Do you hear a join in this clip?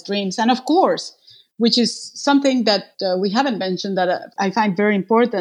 yes; 2 cuts; at 2.9 s, 4.3 s

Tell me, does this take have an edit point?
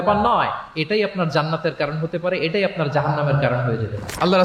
no; 0 cuts

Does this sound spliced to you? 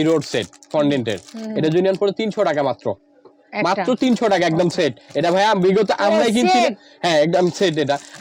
no; 0 cuts

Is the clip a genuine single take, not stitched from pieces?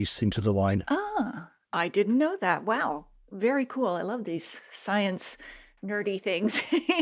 yes; 0 cuts

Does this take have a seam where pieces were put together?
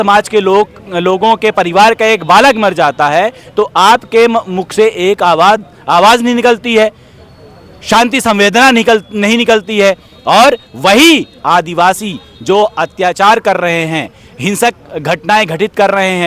no; 0 cuts

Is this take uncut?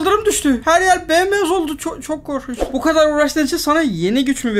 no; 1 cut; at 2.6 s

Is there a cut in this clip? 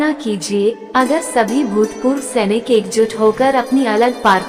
no; 0 cuts

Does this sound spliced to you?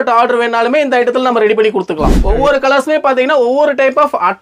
yes; 1 cut; at 2.1 s

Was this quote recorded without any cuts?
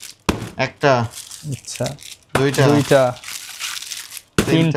yes; 0 cuts

